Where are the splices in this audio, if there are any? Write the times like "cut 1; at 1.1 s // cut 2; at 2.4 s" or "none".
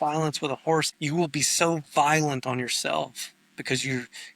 cut 1; at 0.9 s